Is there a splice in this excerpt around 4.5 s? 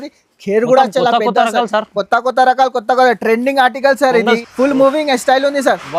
yes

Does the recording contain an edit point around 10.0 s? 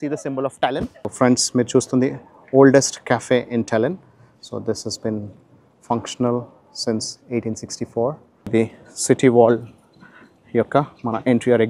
no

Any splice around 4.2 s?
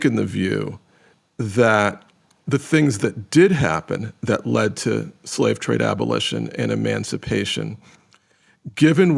no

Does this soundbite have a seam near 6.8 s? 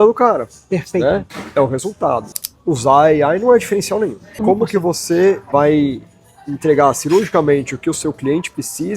no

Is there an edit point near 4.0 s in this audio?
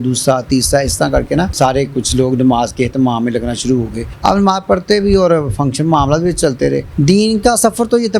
yes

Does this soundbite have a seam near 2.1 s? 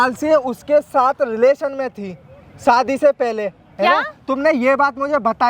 no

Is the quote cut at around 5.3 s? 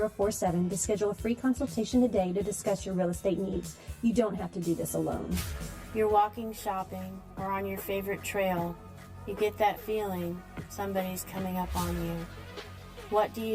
yes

